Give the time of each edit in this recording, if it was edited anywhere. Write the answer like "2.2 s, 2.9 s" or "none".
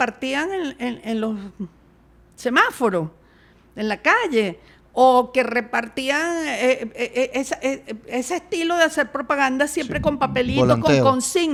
none